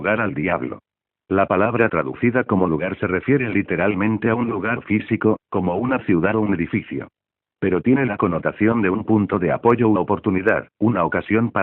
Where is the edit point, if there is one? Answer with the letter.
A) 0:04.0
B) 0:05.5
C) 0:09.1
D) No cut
C